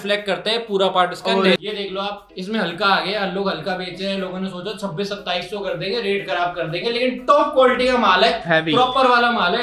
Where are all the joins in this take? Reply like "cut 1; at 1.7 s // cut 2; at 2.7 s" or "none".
cut 1; at 1.6 s